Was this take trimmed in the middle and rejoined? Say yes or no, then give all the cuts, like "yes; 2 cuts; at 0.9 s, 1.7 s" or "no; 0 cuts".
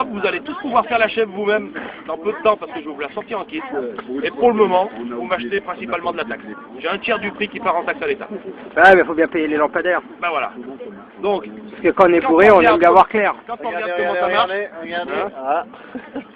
yes; 1 cut; at 8.0 s